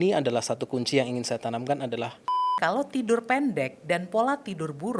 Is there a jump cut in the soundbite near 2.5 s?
yes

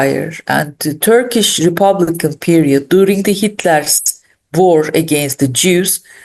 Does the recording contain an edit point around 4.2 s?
no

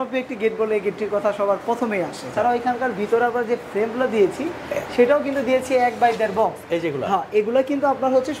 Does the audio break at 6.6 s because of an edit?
no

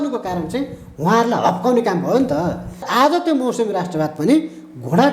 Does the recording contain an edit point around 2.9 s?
yes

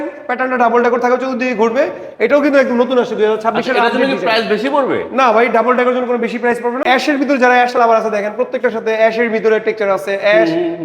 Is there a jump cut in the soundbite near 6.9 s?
yes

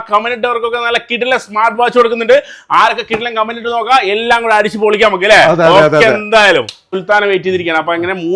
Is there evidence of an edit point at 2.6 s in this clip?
no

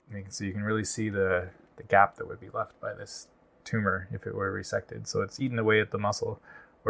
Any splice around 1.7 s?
no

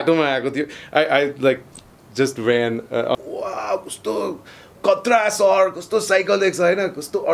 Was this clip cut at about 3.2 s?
yes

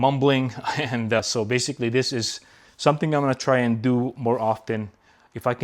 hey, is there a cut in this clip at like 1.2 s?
yes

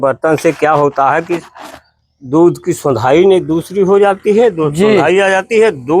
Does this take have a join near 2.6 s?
no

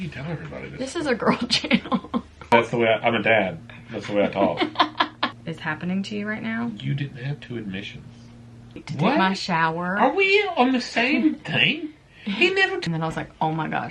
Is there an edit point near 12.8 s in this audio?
yes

